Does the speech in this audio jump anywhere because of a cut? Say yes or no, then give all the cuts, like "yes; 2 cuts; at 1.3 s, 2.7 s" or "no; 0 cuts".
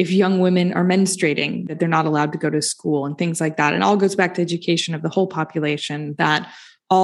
yes; 1 cut; at 1.7 s